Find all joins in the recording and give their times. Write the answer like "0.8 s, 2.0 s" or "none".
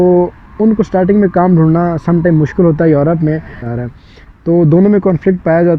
3.6 s